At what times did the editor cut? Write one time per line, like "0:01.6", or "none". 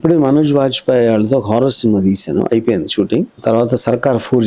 0:03.3